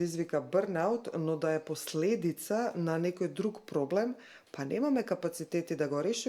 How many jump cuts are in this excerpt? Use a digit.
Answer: 0